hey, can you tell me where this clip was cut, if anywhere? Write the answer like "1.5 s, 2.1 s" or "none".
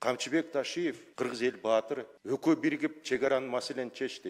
1.0 s, 2.1 s